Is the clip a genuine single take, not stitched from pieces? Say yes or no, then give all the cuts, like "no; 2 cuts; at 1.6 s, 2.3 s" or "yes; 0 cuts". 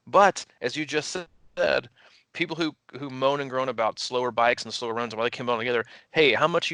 yes; 0 cuts